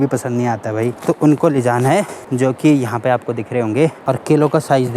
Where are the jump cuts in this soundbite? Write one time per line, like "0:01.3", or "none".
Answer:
0:01.0
0:02.2
0:04.0